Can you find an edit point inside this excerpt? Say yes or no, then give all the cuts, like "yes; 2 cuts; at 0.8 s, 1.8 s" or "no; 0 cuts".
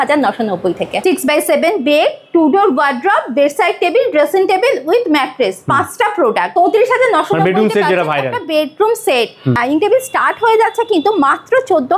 yes; 3 cuts; at 1.0 s, 6.5 s, 9.6 s